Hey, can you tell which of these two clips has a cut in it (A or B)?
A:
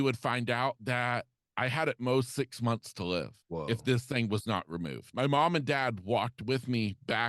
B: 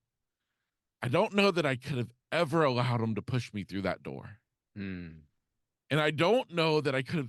A